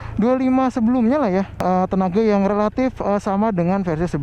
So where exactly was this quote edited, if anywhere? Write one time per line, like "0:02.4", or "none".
0:01.6

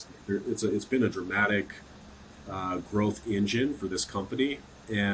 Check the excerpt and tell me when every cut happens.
none

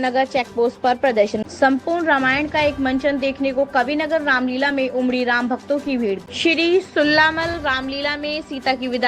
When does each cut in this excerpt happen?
0:01.4
0:06.2

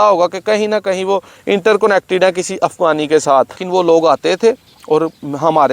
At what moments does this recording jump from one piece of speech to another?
0:03.6

